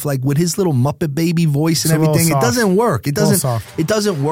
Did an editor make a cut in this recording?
no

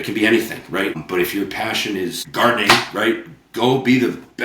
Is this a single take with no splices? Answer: no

